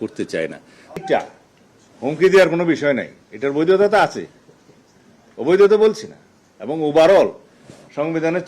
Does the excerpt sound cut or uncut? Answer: cut